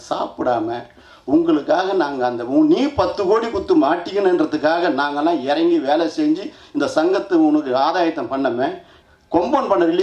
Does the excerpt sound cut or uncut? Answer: cut